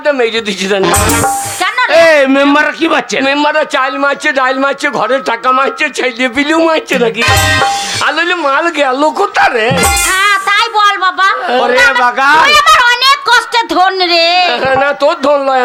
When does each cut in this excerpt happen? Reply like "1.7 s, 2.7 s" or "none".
none

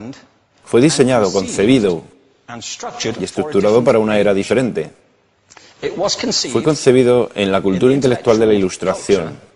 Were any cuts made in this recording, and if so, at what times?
1.6 s

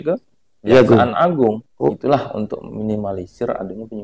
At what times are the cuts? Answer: 1.9 s

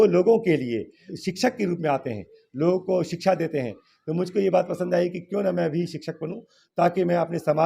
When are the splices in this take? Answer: 1.1 s

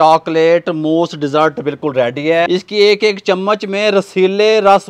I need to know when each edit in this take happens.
2.5 s

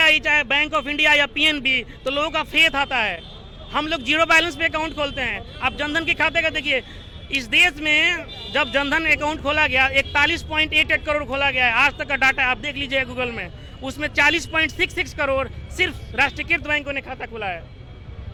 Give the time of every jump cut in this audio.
none

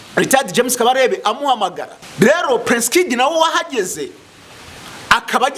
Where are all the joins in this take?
1.9 s

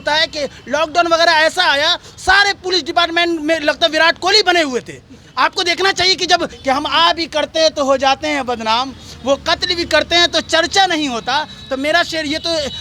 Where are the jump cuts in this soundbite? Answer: 6.5 s

